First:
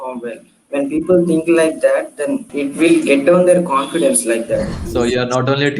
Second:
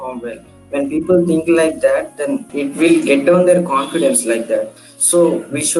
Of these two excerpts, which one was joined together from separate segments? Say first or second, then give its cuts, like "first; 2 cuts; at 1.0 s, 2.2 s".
first; 1 cut; at 4.8 s